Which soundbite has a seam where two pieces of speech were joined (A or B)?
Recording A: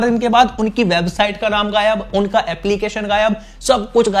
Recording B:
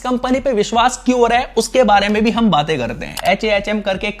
B